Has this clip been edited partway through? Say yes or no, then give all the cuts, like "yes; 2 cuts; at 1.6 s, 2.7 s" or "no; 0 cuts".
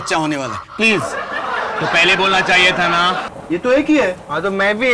yes; 1 cut; at 3.3 s